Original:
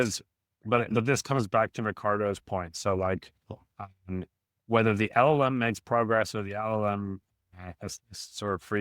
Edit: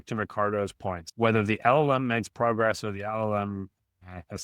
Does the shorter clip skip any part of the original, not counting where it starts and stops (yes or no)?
yes